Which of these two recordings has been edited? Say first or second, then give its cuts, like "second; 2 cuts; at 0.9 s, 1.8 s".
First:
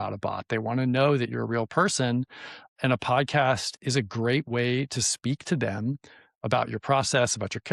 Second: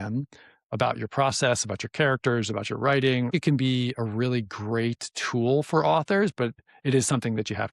second; 2 cuts; at 3.3 s, 6.6 s